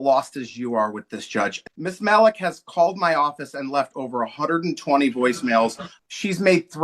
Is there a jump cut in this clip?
yes; 2 cuts; at 1.6 s, 5.9 s

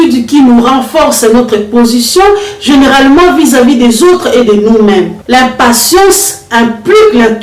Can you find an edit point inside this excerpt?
yes; 1 cut; at 5.1 s

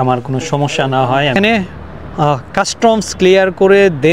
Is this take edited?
yes; 1 cut; at 1.4 s

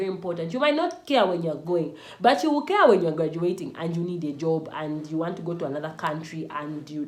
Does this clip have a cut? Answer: no; 0 cuts

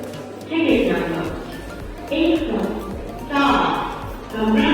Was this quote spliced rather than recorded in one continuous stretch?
no; 0 cuts

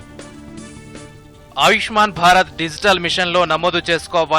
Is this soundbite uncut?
no; 1 cut; at 1.1 s

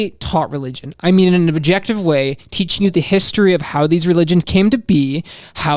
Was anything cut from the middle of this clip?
no; 0 cuts

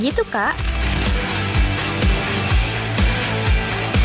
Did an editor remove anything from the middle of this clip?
no; 0 cuts

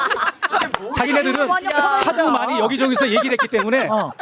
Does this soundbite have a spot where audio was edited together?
no; 0 cuts

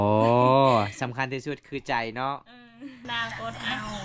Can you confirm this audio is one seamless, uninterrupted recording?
no; 1 cut; at 3.0 s

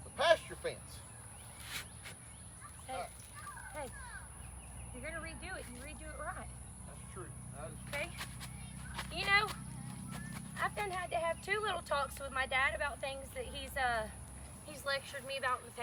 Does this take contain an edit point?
no; 0 cuts

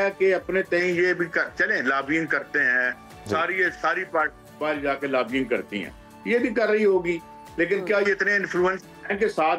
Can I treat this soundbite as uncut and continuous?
yes; 0 cuts

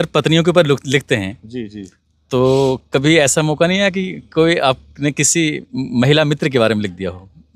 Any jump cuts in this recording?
no; 0 cuts

